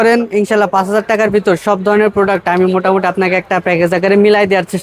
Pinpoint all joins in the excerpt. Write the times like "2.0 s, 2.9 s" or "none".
none